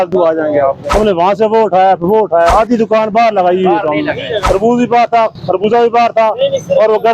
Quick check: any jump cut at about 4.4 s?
yes; 3 cuts; at 0.8 s, 2.5 s, 4.4 s

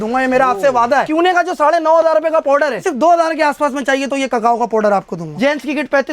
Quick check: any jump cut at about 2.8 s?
yes; 3 cuts; at 1.1 s, 2.8 s, 5.2 s

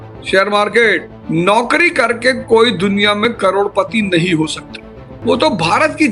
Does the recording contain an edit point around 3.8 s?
no; 2 cuts; at 1.1 s, 5.1 s

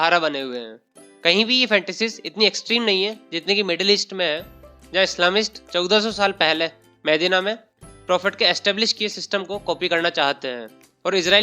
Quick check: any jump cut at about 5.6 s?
no; 0 cuts

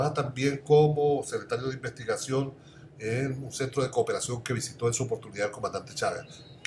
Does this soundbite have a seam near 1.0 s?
no; 1 cut; at 5.4 s

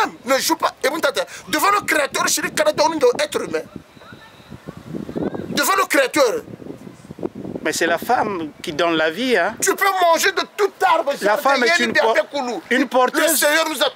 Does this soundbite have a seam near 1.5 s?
no; 0 cuts

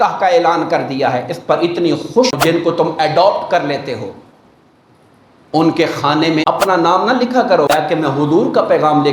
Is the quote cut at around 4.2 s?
no; 3 cuts; at 2.3 s, 6.4 s, 7.7 s

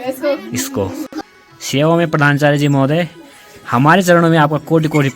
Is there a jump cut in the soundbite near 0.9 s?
yes; 1 cut; at 0.9 s

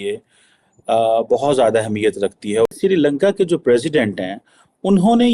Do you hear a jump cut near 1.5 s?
no; 1 cut; at 2.7 s

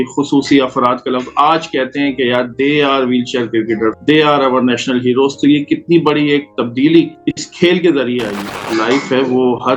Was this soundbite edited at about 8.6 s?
yes; 1 cut; at 8.6 s

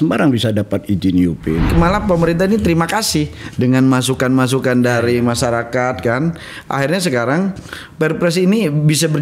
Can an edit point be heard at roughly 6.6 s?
no; 1 cut; at 1.7 s

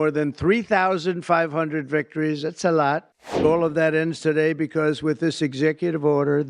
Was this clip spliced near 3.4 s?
yes; 1 cut; at 3.4 s

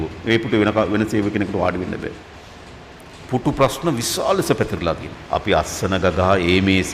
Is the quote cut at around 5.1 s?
yes; 1 cut; at 5.1 s

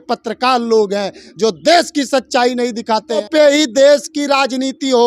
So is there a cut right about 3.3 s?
yes; 1 cut; at 3.3 s

